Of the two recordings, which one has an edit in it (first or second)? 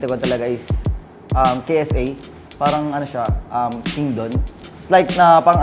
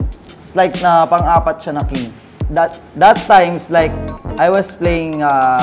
second